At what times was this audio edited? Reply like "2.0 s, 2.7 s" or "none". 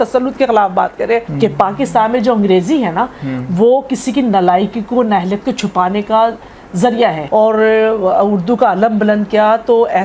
1.3 s, 7.2 s